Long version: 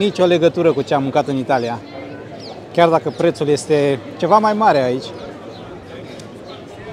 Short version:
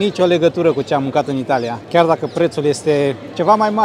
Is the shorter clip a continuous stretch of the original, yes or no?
no